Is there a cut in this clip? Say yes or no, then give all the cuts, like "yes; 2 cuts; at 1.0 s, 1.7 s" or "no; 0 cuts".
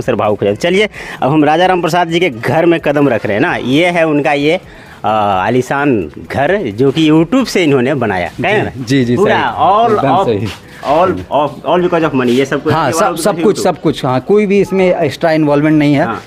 no; 0 cuts